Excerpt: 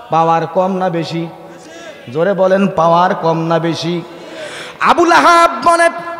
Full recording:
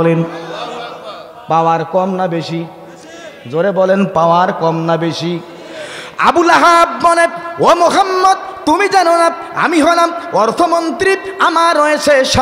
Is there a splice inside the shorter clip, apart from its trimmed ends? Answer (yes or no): no